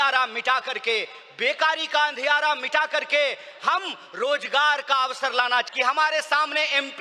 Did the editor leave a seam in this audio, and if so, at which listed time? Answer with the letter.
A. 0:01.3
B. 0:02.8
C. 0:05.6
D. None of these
C